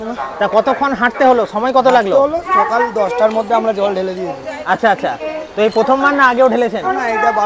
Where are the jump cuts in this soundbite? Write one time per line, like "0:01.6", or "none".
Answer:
none